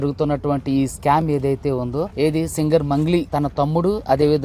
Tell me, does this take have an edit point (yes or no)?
yes